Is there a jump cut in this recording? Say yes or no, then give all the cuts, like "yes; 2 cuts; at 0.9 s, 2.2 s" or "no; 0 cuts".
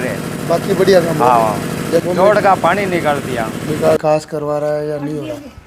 yes; 2 cuts; at 2.0 s, 4.0 s